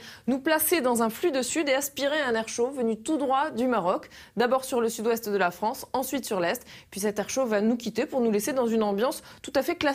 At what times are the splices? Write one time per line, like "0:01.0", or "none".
0:05.9